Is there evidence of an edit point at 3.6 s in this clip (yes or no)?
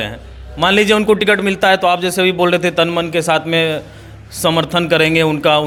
no